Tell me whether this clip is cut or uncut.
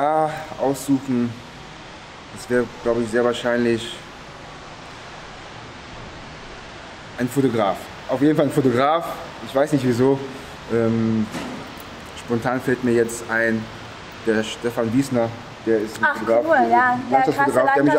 uncut